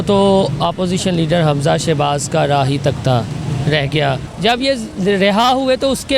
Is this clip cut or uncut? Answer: cut